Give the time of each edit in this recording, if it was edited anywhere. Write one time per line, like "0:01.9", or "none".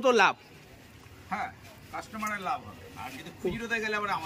none